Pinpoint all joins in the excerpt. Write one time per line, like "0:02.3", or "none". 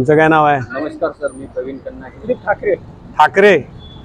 0:02.2